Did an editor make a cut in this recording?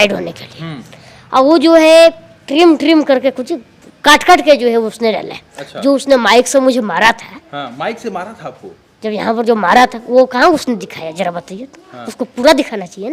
no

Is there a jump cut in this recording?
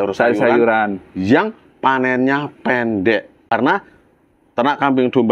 yes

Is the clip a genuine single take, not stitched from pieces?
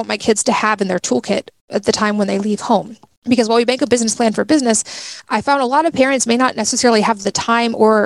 yes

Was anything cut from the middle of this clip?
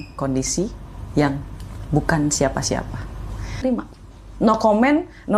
yes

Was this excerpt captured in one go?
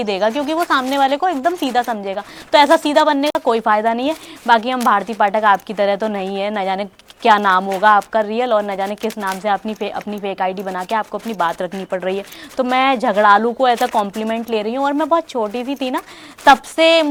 yes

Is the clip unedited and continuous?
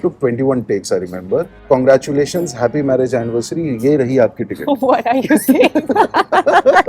no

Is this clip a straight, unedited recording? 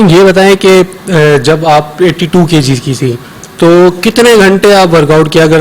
yes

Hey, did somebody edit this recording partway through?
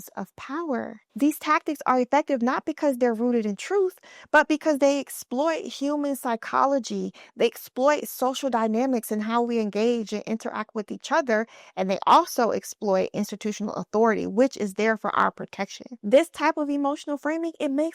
yes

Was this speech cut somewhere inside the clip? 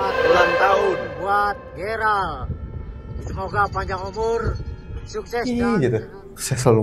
no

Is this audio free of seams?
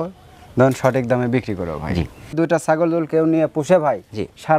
no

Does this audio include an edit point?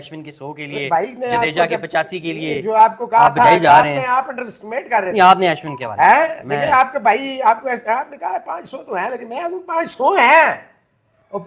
no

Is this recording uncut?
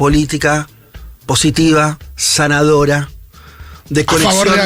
yes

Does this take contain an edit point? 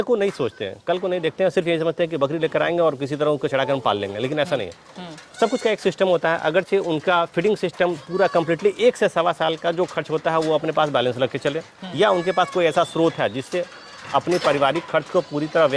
no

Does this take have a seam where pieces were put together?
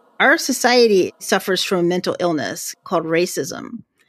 yes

